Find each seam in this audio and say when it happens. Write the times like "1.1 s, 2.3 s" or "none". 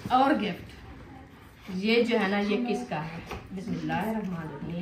3.6 s